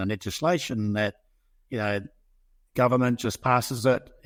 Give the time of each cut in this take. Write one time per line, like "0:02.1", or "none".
none